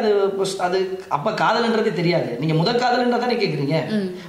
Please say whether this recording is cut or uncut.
uncut